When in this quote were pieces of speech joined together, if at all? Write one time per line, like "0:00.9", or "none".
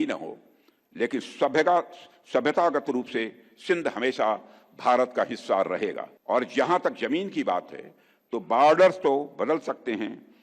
0:06.1